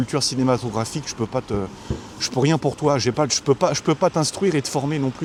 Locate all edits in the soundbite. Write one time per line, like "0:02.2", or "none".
none